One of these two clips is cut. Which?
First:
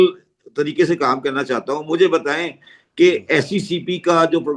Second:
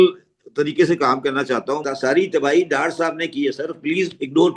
second; 1 cut; at 1.8 s

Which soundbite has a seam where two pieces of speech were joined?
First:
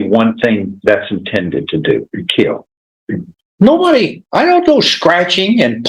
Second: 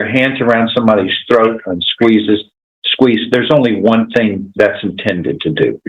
first; 1 cut; at 3.2 s

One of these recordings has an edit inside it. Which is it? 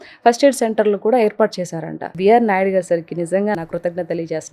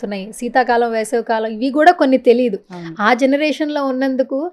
first; 2 cuts; at 2.0 s, 3.6 s

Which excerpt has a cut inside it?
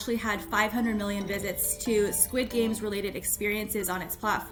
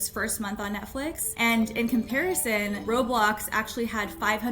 second; 2 cuts; at 1.3 s, 2.8 s

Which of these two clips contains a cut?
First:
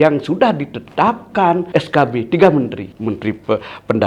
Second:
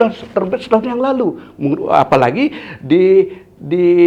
first; 2 cuts; at 1.6 s, 2.9 s

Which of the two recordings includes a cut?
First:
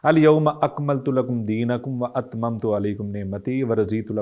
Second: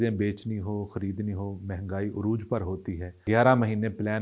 second; 1 cut; at 3.2 s

